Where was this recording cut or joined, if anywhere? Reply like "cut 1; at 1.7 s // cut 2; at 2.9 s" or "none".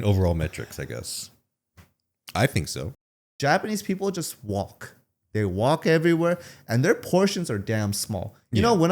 cut 1; at 3.3 s

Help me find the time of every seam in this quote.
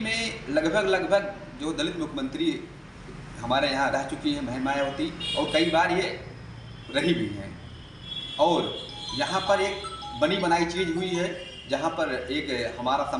none

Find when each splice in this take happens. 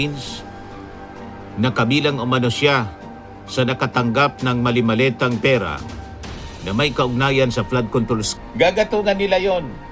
cut 1; at 8.3 s

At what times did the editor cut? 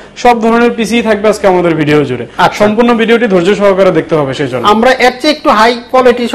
none

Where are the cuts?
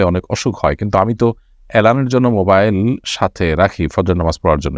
none

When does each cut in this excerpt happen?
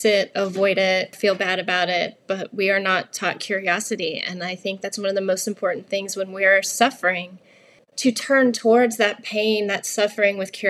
cut 1; at 1.2 s

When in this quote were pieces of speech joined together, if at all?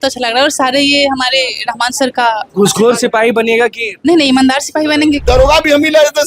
cut 1; at 3.9 s // cut 2; at 5.2 s

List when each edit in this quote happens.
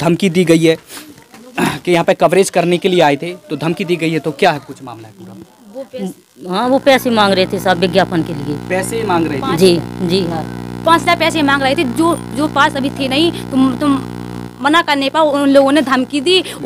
none

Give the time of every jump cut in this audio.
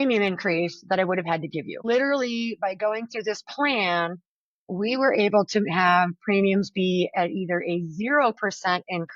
cut 1; at 1.8 s

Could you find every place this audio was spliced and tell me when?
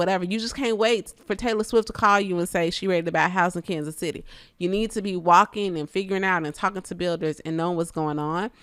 none

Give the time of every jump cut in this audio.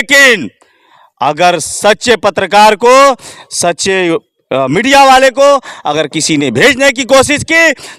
none

